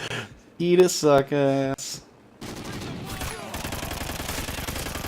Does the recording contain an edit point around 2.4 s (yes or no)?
yes